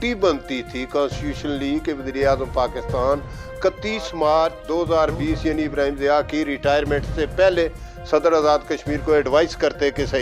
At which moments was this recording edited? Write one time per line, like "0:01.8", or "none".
0:04.6